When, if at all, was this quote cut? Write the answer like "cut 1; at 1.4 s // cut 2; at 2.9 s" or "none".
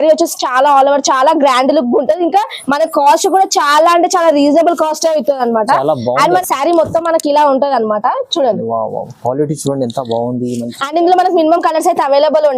cut 1; at 6.4 s